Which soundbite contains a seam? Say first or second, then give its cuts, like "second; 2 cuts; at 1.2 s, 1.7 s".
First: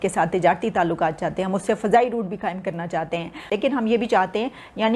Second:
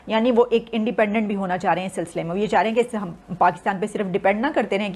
first; 1 cut; at 3.4 s